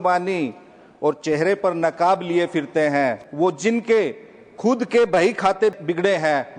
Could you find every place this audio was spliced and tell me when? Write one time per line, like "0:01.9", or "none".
0:03.2
0:05.8